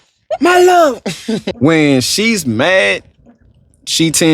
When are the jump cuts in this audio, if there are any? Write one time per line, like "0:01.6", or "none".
0:01.5